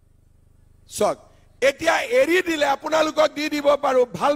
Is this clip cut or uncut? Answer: uncut